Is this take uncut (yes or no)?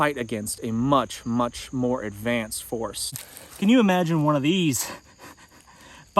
no